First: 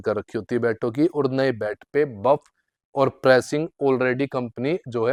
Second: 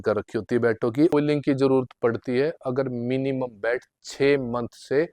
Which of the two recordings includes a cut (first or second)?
second